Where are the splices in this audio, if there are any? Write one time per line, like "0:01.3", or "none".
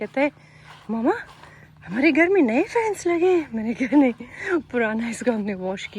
none